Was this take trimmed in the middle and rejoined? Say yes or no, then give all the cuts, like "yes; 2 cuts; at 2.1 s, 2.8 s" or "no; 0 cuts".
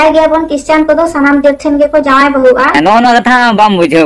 yes; 1 cut; at 2.8 s